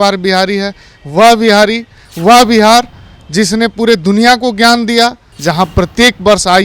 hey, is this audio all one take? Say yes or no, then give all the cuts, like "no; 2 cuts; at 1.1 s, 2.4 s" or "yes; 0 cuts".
no; 1 cut; at 5.3 s